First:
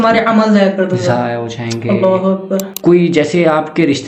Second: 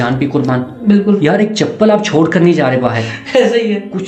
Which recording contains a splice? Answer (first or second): first